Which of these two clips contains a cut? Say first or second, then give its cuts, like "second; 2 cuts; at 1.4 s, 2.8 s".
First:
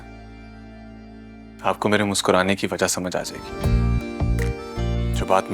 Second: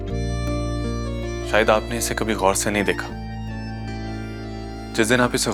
first; 1 cut; at 3.4 s